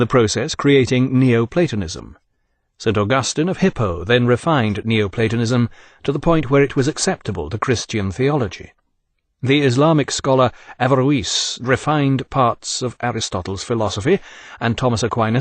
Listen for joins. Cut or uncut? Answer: cut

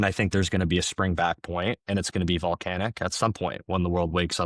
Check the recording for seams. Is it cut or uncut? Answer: uncut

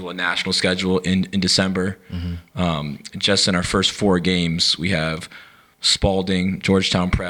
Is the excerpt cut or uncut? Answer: uncut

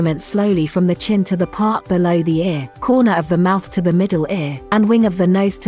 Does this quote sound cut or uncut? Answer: cut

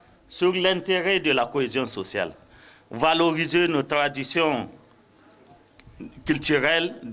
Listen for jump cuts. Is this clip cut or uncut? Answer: uncut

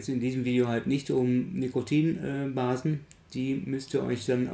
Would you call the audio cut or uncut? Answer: uncut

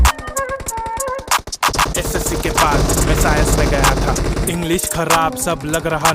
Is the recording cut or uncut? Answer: cut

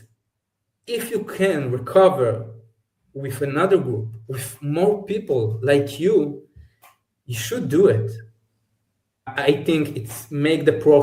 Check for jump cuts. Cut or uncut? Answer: cut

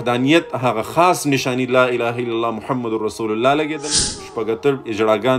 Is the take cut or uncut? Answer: cut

